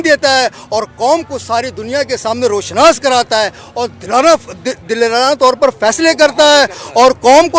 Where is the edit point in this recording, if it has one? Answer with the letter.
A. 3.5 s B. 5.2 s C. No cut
C